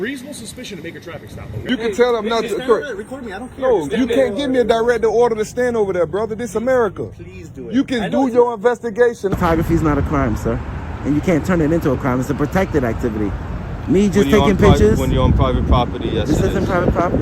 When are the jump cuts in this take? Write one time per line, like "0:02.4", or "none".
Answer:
0:01.6
0:09.3